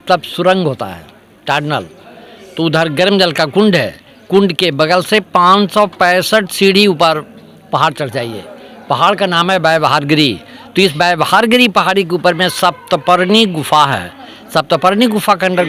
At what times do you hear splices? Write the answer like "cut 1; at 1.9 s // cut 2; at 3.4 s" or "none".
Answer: none